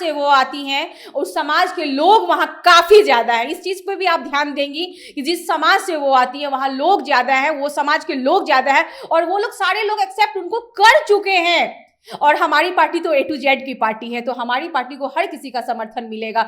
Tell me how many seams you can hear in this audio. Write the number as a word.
zero